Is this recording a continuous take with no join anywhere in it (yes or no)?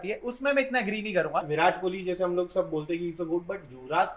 no